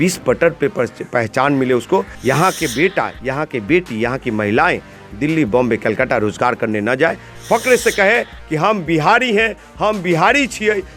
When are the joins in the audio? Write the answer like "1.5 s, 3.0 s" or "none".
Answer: 2.1 s